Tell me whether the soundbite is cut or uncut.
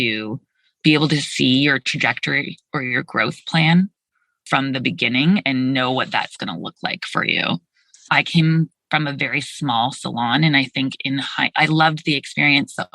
cut